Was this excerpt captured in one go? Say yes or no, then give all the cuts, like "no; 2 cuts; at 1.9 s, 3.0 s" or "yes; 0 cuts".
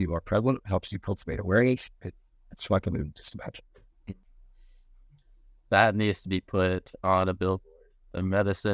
no; 1 cut; at 4.3 s